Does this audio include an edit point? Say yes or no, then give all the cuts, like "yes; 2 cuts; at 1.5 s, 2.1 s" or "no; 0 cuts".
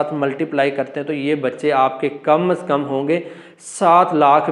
no; 0 cuts